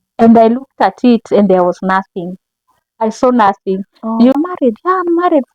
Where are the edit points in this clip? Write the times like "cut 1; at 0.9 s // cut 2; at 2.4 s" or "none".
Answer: cut 1; at 4.3 s

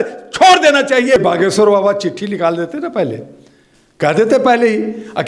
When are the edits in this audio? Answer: cut 1; at 1.2 s

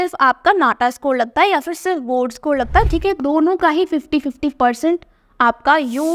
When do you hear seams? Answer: cut 1; at 2.9 s

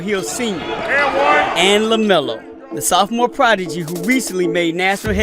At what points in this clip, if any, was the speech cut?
cut 1; at 3.6 s

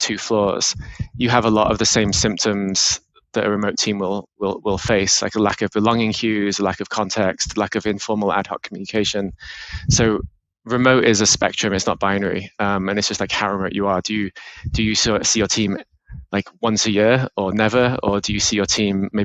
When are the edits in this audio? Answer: none

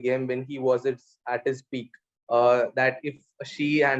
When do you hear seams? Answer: cut 1; at 2.1 s

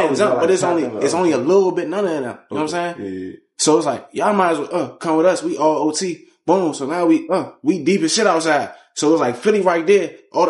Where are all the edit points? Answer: none

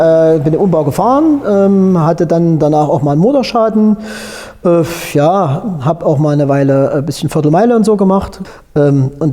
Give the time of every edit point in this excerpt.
cut 1; at 8.4 s

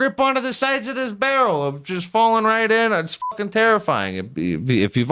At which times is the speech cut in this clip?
none

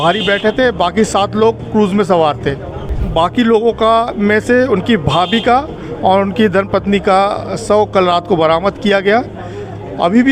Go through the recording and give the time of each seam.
cut 1; at 2.9 s

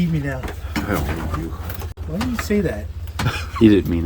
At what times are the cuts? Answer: cut 1; at 2.0 s

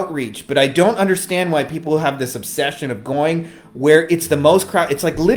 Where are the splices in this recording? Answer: none

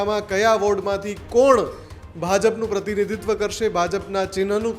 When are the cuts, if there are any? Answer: none

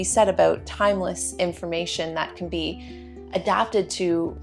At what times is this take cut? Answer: none

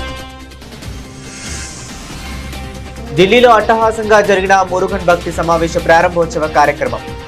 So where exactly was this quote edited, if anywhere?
cut 1; at 1.2 s // cut 2; at 3.1 s

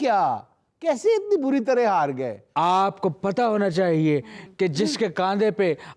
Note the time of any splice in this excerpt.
cut 1; at 2.4 s

